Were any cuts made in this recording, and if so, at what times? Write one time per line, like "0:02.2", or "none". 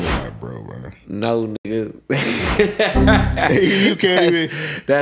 none